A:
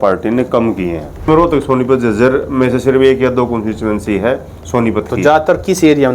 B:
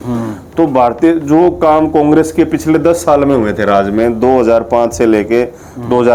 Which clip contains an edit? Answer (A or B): A